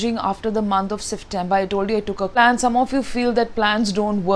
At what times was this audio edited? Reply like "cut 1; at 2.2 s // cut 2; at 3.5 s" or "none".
cut 1; at 2.4 s